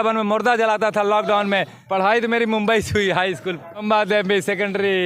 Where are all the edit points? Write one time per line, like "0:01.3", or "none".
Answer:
0:01.8
0:03.8